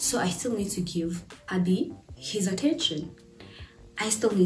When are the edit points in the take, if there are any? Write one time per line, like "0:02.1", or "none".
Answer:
0:01.3

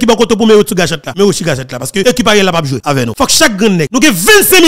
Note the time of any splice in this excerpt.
0:01.0
0:02.0
0:02.8
0:03.9

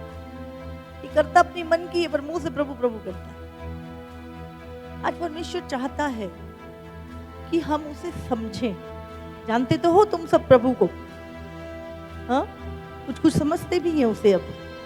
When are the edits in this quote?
none

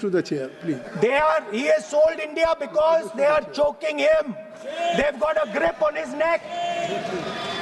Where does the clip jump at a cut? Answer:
none

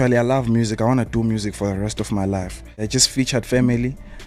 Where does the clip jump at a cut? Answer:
0:02.8

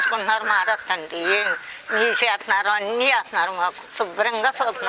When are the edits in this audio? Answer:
0:03.8

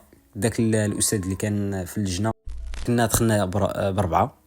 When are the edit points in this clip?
0:02.8

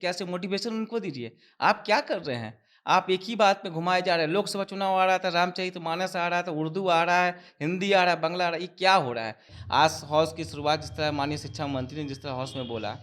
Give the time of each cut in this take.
0:09.5

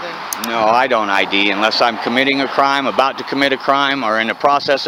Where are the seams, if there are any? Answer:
none

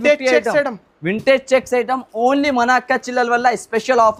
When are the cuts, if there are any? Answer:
none

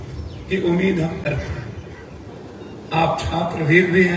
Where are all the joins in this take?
0:02.3

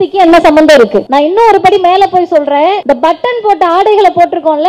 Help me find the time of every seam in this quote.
0:01.0
0:02.8

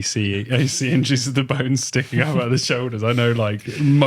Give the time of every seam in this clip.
none

